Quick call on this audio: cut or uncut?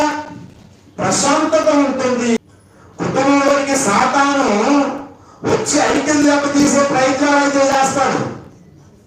cut